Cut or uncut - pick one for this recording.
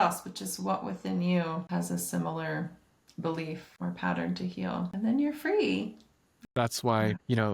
cut